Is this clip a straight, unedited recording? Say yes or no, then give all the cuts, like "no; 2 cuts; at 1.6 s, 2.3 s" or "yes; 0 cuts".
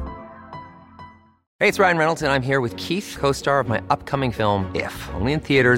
no; 1 cut; at 1.4 s